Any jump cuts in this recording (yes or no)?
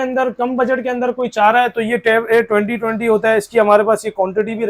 no